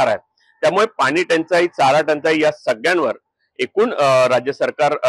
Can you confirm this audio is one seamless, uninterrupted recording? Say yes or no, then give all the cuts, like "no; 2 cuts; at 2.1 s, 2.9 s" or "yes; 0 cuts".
yes; 0 cuts